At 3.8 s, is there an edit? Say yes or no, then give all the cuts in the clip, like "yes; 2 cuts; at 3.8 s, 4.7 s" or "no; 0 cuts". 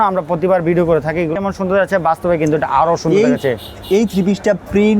no; 1 cut; at 1.3 s